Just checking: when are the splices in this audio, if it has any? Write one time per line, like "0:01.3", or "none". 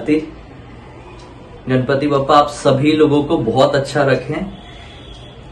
0:01.5

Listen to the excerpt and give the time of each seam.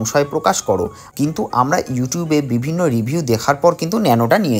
0:01.0

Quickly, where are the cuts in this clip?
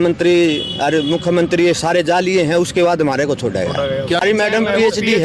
0:04.2

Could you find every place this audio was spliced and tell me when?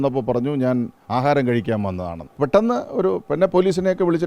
0:02.3

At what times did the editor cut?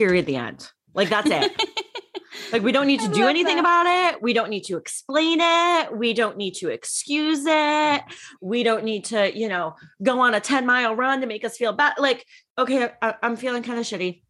none

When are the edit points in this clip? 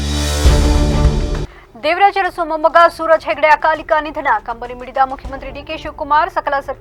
none

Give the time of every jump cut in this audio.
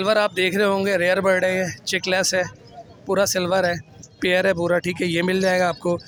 none

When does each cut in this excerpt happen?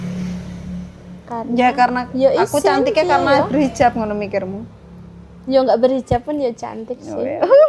none

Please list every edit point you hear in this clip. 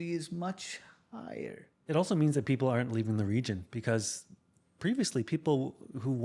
0:01.7

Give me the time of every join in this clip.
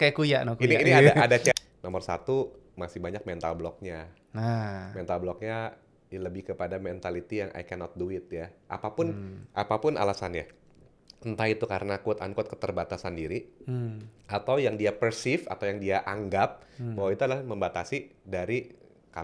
0:01.5

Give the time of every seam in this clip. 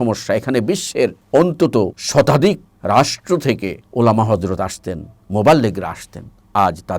0:01.2
0:02.0
0:02.7
0:03.8

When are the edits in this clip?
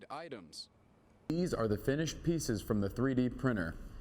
0:01.3

